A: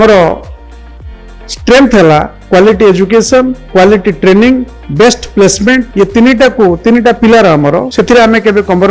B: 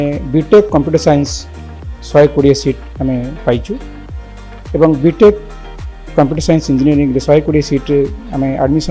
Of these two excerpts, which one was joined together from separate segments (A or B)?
A